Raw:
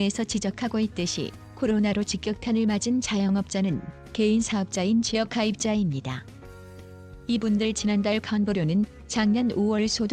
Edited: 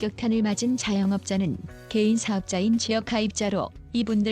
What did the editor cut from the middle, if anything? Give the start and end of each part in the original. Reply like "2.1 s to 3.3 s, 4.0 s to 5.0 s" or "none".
5.6 s to 6.7 s

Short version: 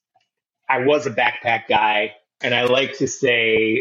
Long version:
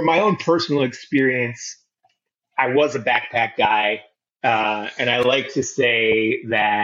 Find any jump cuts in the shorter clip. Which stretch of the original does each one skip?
4.2 s to 4.9 s

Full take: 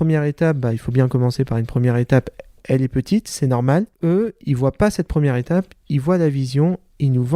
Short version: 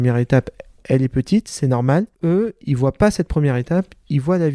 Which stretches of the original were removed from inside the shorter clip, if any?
none

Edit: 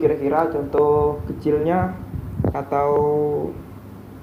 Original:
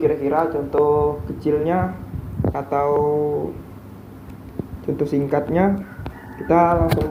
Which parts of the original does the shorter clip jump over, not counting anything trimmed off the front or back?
none

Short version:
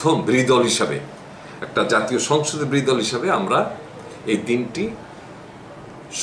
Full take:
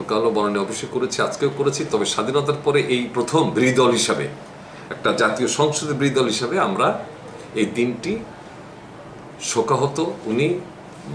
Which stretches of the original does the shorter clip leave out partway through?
none

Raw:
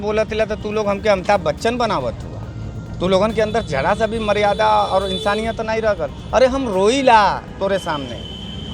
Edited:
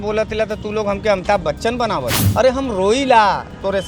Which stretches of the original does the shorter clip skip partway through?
2.2 s to 6.2 s

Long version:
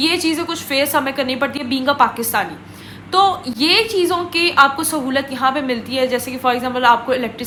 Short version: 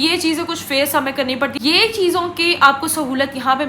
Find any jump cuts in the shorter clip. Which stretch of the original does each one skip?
1.6 s to 3.5 s

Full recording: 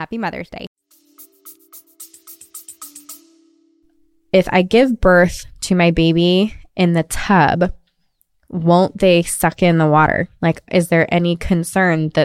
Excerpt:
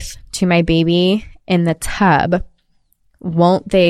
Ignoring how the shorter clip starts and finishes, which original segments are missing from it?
none

